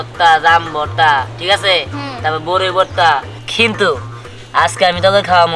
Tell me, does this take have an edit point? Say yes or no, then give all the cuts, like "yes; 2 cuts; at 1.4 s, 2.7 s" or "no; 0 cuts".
yes; 1 cut; at 3.4 s